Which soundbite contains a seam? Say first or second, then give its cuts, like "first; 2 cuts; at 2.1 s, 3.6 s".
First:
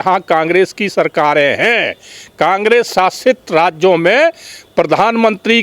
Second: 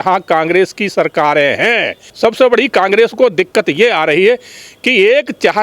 second; 1 cut; at 2.0 s